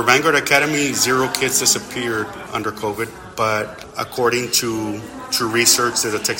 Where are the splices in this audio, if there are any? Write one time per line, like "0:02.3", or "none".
0:02.4
0:03.8